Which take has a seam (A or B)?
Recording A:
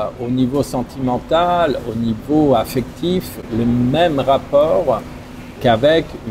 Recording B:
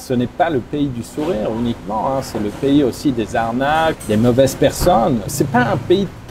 B